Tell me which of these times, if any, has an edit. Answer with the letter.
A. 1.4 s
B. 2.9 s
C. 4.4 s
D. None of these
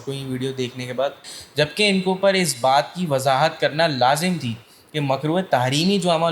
A